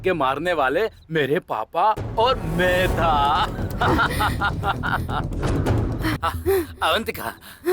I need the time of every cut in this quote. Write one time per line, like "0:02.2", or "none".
0:06.2